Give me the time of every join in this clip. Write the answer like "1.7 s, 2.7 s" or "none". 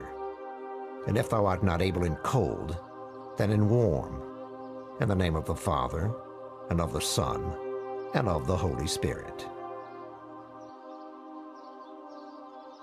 11.6 s